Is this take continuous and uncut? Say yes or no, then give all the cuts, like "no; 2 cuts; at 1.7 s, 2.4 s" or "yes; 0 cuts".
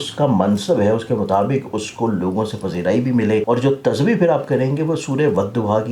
no; 1 cut; at 3.4 s